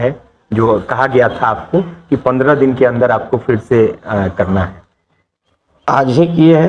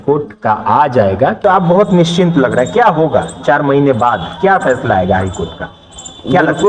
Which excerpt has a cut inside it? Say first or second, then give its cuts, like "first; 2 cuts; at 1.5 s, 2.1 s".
second; 1 cut; at 1.4 s